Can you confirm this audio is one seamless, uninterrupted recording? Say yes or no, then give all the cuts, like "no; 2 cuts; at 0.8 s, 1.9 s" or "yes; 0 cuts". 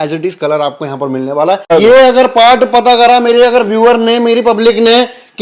no; 1 cut; at 1.7 s